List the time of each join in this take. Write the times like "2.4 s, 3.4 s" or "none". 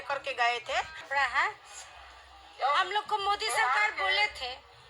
1.1 s